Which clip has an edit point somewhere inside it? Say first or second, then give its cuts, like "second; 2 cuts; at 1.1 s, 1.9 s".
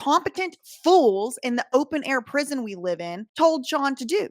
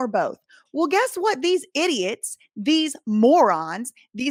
first; 1 cut; at 3.2 s